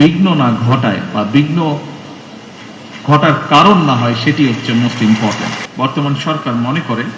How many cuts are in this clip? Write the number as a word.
one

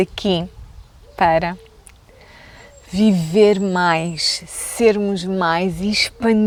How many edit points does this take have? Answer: zero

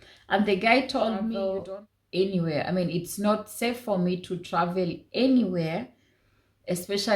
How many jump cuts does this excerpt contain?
one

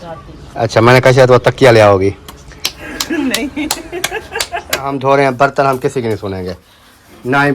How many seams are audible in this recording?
one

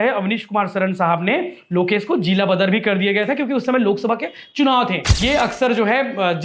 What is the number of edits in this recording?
one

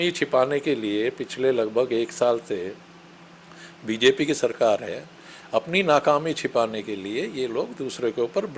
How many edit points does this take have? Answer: zero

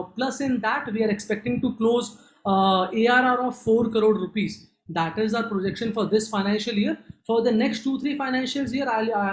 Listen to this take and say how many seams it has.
zero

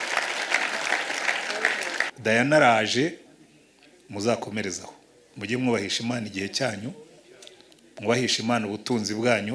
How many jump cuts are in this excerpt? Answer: one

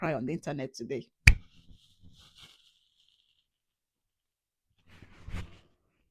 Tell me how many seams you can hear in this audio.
zero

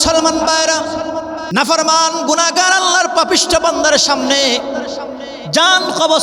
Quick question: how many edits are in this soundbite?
one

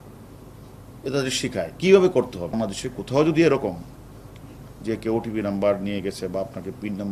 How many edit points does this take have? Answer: one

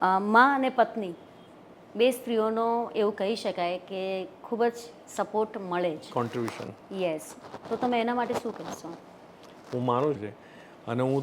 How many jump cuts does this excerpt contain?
one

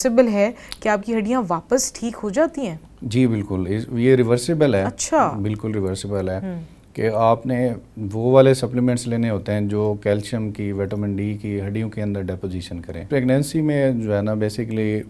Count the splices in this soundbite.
one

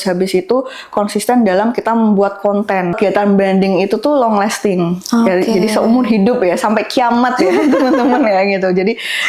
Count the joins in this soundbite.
one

